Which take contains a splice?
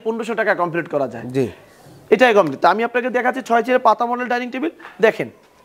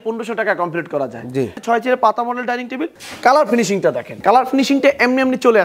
second; 3 cuts; at 1.6 s, 3.0 s, 4.1 s

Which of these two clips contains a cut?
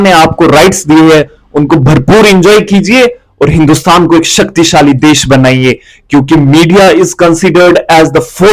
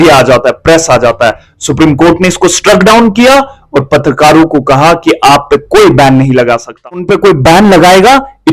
second; 1 cut; at 7.0 s

